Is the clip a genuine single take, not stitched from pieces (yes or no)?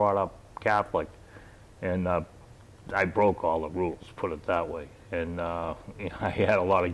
yes